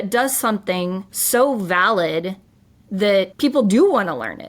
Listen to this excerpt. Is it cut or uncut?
cut